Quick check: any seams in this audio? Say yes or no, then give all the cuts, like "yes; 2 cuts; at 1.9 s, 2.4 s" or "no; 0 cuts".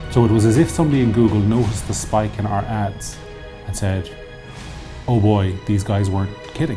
no; 0 cuts